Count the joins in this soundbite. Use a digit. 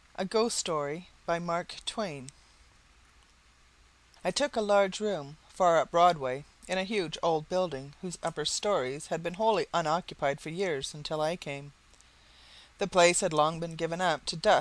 1